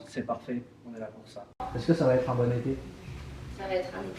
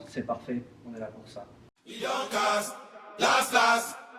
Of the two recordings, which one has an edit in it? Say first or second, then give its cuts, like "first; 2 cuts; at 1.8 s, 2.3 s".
first; 1 cut; at 1.7 s